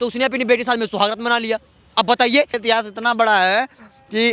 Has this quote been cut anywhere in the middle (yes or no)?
yes